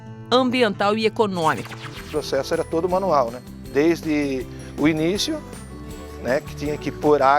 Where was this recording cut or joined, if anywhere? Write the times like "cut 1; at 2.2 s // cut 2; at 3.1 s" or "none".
cut 1; at 2.0 s